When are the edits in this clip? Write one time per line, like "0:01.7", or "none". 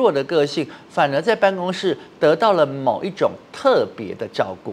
none